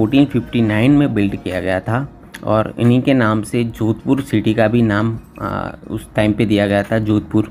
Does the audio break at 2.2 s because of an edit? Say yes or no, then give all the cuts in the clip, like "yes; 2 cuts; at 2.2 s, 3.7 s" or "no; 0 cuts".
no; 0 cuts